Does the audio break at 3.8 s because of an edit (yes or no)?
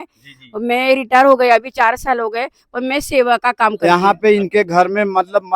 yes